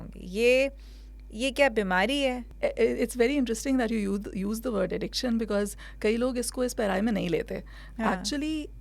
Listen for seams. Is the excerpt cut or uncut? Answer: cut